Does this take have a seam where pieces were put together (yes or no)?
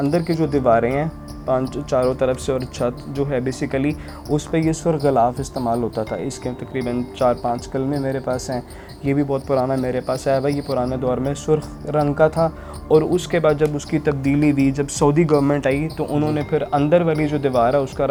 no